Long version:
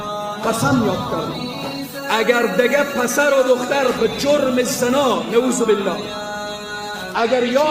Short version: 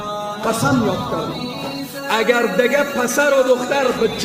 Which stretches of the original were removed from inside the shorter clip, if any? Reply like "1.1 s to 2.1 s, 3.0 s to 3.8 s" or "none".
none

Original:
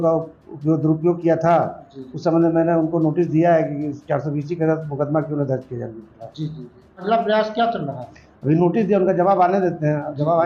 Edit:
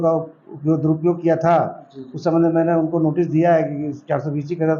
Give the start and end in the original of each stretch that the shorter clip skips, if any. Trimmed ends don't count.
none

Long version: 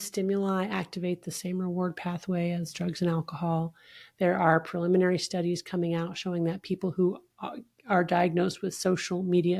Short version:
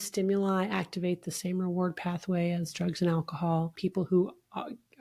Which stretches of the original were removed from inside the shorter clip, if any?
3.8 s to 6.6 s

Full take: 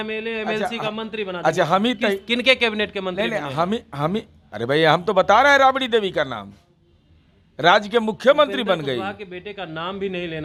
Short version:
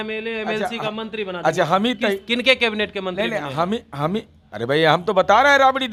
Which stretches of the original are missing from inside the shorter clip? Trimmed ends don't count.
none

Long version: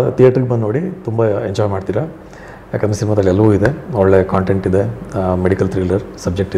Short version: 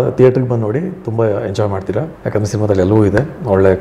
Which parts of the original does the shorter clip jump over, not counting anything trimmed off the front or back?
2.2 s to 2.6 s

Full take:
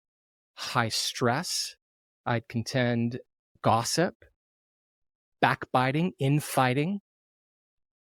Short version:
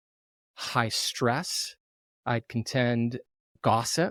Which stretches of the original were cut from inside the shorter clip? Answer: none

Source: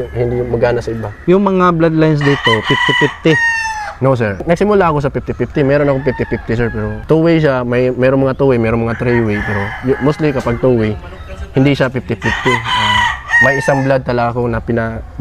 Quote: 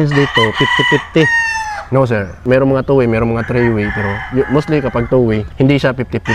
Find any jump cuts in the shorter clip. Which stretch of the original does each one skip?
4.5 s to 7.9 s, 11.0 s to 11.4 s

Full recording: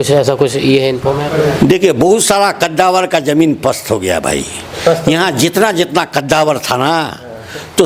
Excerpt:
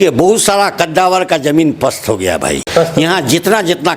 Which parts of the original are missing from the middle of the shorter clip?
4.4 s to 4.7 s

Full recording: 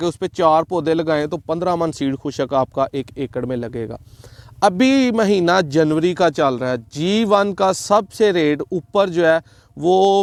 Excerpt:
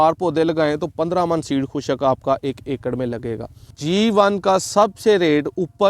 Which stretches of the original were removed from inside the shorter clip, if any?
4.2 s to 6.9 s

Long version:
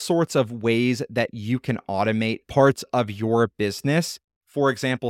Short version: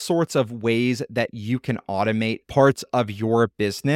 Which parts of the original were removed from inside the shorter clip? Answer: none

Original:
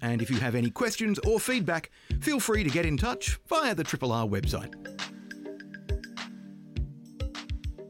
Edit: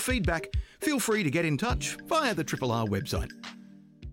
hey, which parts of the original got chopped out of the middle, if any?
4.6 s to 6.0 s

